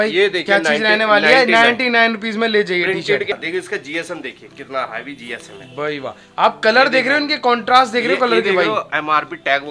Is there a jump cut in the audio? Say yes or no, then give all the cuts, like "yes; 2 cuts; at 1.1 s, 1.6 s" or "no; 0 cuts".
yes; 1 cut; at 3.3 s